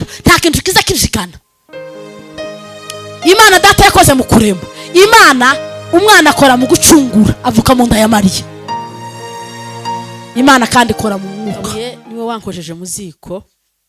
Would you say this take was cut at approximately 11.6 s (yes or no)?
yes